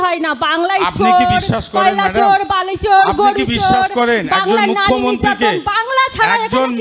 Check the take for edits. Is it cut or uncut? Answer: uncut